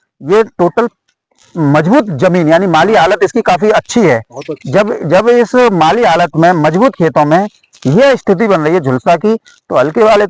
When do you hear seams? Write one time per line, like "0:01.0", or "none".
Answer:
none